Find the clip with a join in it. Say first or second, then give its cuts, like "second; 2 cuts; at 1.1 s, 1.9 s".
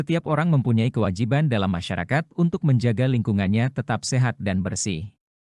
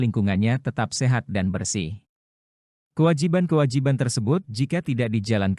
second; 1 cut; at 4.5 s